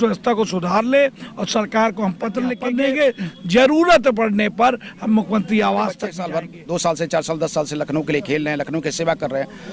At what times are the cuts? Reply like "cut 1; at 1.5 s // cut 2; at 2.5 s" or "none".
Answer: cut 1; at 2.6 s // cut 2; at 6.1 s